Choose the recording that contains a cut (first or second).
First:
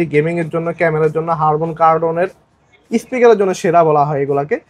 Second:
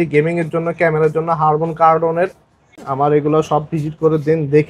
second